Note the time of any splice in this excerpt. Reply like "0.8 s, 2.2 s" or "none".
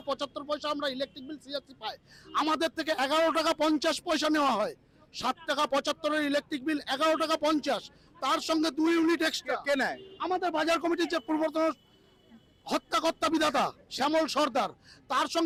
none